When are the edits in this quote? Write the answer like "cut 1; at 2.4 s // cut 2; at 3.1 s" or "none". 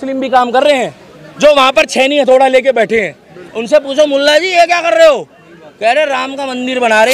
none